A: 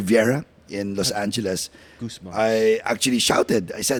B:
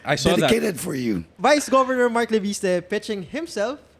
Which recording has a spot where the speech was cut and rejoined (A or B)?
B